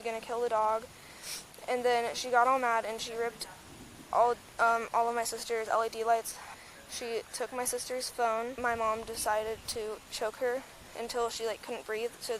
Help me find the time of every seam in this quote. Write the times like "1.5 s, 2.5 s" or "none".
6.5 s, 8.5 s